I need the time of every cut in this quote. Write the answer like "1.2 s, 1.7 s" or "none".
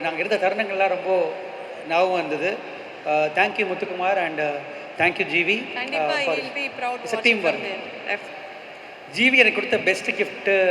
8.3 s